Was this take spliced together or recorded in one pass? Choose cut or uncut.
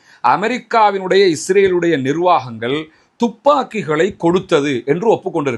uncut